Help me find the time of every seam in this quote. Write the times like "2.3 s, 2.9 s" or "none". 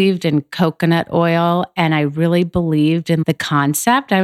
3.2 s